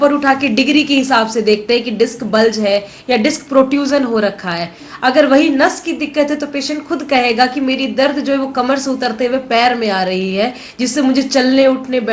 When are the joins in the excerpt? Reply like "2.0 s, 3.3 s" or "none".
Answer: none